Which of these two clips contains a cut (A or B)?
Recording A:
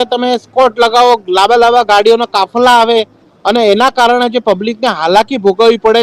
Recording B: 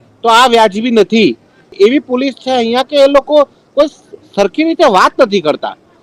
B